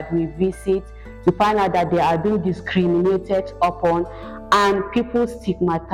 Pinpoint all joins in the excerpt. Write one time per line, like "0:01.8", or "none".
none